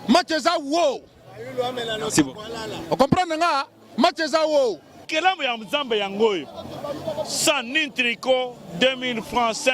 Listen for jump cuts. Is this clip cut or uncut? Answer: cut